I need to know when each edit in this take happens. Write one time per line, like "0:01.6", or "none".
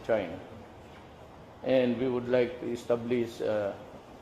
0:03.0